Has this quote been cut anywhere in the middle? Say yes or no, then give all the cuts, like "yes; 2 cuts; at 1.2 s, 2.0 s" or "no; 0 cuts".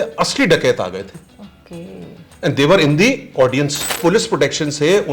yes; 1 cut; at 3.9 s